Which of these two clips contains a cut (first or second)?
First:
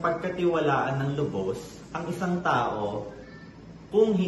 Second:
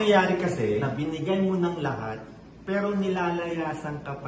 second